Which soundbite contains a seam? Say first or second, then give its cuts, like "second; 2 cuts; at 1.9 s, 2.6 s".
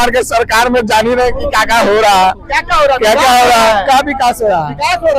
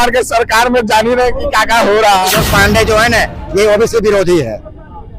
second; 1 cut; at 2.4 s